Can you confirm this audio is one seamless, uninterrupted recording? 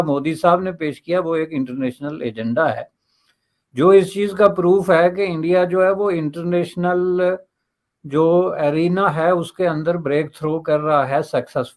yes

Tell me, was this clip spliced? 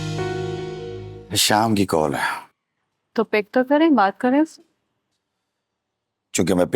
yes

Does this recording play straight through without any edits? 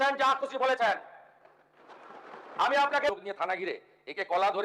no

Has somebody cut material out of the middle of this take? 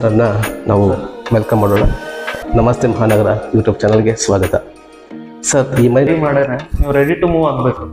yes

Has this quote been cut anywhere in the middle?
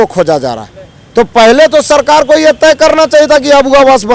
no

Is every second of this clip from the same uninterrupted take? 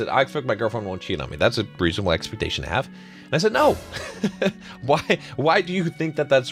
yes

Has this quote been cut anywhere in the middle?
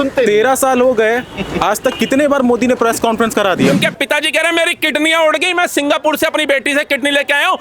yes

